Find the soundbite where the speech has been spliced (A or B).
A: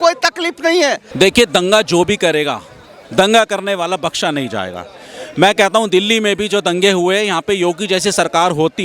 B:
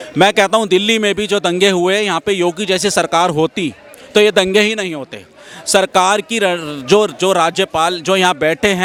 A